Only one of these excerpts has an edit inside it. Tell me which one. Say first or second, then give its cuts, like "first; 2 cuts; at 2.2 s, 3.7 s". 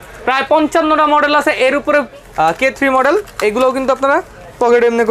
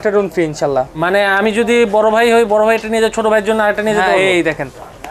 first; 1 cut; at 2.2 s